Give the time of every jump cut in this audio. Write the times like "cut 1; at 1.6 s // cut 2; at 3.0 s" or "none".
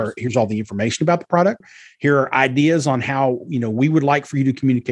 cut 1; at 1.7 s